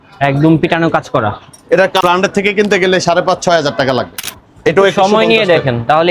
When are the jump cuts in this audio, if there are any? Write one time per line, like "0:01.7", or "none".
0:02.0
0:04.2